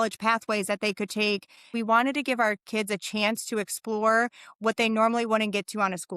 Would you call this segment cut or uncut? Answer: cut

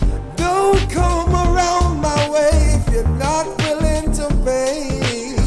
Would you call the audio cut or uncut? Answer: cut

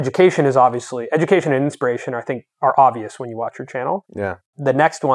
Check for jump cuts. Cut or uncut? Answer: uncut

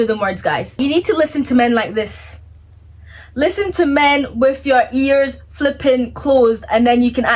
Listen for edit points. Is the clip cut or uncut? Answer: uncut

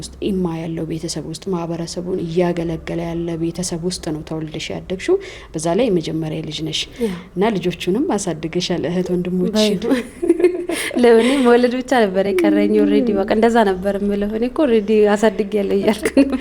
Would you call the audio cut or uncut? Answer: uncut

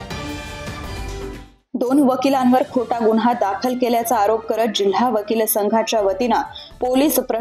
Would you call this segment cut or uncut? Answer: cut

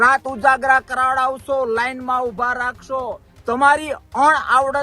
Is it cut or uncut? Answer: cut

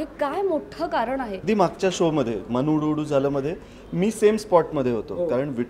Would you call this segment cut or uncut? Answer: cut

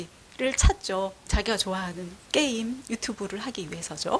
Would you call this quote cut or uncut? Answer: uncut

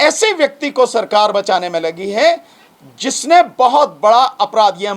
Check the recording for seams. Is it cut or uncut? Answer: uncut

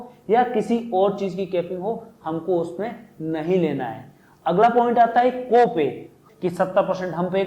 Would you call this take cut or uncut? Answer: cut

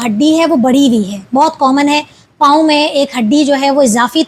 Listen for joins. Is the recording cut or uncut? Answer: uncut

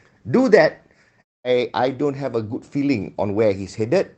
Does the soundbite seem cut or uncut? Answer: cut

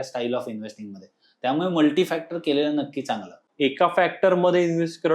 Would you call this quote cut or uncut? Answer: cut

